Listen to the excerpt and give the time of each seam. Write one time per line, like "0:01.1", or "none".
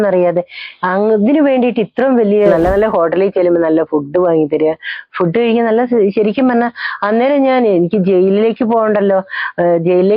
0:02.5